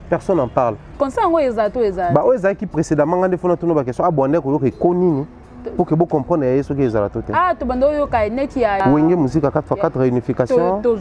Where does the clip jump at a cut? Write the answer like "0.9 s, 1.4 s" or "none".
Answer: 0.9 s, 8.8 s